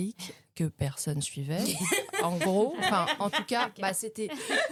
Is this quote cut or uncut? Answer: uncut